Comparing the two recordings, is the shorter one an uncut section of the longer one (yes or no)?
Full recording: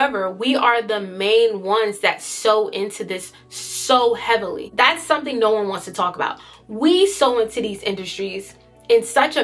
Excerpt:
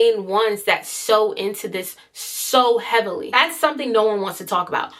no